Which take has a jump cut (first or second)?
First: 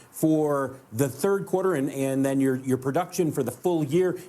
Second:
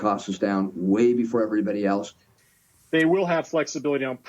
second